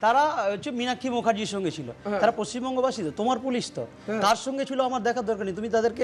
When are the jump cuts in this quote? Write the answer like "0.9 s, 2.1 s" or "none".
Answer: none